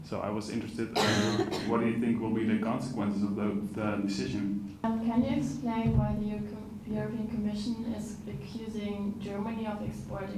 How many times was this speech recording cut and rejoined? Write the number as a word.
one